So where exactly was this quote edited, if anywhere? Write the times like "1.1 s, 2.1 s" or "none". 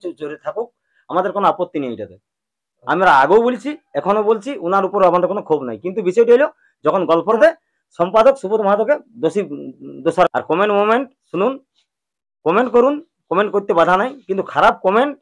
7.4 s, 10.3 s